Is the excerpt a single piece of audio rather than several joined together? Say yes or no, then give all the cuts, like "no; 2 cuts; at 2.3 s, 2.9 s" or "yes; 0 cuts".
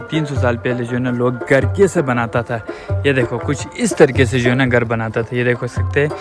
yes; 0 cuts